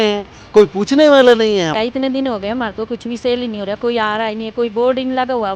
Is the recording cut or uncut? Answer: cut